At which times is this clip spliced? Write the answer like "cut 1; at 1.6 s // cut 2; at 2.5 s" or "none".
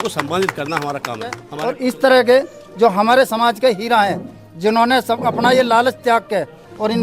cut 1; at 1.5 s